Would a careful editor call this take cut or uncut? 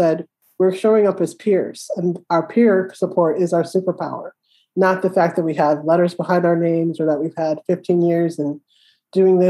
uncut